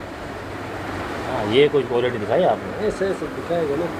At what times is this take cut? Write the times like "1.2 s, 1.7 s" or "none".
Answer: none